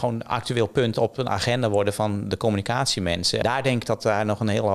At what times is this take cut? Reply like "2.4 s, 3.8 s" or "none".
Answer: 3.4 s